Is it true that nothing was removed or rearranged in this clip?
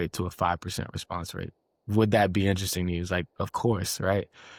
yes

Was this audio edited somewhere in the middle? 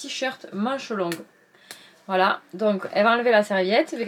no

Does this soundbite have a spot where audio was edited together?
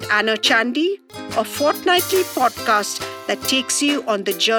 no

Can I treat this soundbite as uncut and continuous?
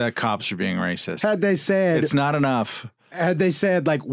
yes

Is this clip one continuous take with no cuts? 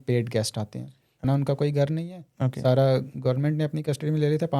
no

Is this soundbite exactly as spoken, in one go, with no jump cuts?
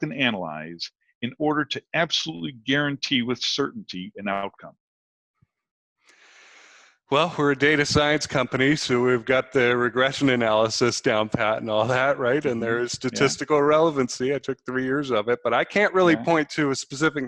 yes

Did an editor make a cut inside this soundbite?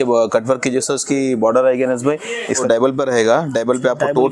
yes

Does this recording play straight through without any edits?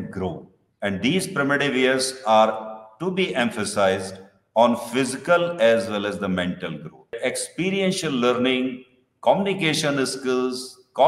no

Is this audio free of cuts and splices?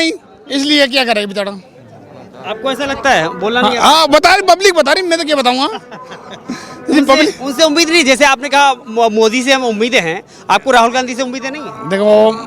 yes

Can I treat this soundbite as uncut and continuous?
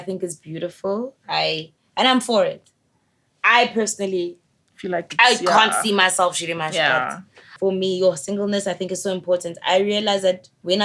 no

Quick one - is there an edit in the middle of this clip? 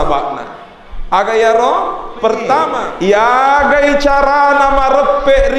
yes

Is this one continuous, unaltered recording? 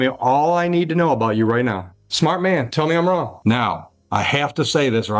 no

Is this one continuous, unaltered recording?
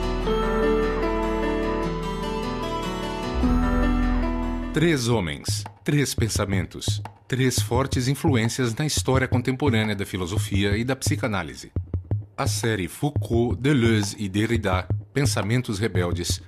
no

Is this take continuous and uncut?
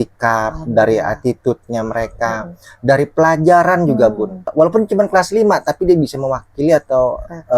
no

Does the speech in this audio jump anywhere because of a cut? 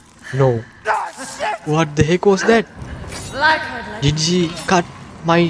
no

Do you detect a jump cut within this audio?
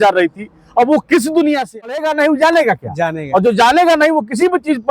yes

